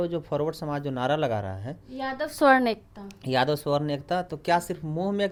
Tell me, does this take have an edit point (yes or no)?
no